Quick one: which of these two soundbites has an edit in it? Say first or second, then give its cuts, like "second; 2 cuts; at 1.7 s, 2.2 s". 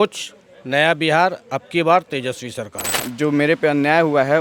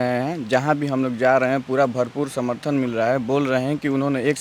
first; 1 cut; at 3.0 s